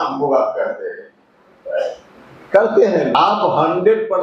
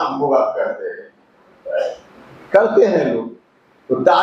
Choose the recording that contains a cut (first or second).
first